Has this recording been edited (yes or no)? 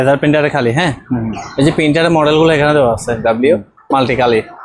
yes